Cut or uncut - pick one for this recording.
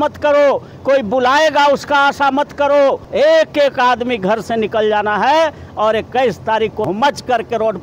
cut